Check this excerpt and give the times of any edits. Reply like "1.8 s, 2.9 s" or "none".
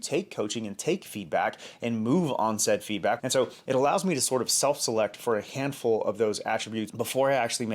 3.2 s